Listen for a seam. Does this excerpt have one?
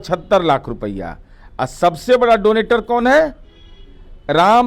no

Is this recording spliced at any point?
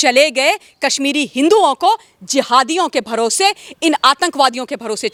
no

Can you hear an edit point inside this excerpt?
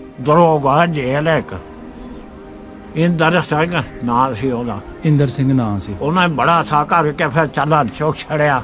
yes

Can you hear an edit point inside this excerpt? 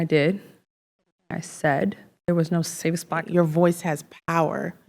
yes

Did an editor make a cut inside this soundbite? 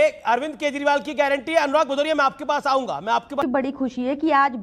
yes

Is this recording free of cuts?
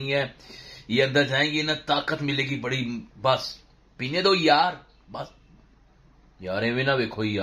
yes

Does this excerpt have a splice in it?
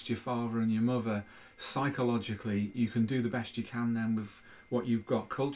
no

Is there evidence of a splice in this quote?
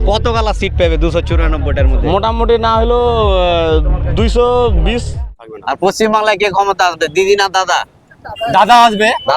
yes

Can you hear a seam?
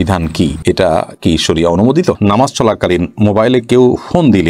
yes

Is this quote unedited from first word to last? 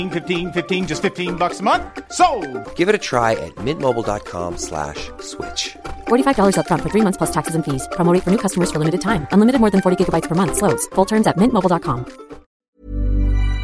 no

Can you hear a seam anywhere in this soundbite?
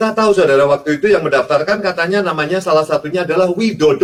no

